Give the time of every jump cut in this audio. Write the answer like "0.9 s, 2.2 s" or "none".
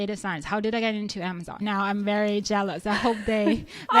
1.6 s